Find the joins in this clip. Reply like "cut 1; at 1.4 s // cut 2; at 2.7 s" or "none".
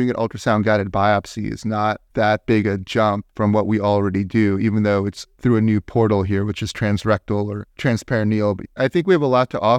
cut 1; at 8.7 s